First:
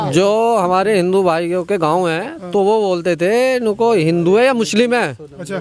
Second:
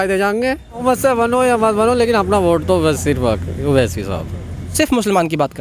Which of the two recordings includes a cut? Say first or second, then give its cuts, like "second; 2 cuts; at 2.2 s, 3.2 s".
second; 2 cuts; at 0.8 s, 4.6 s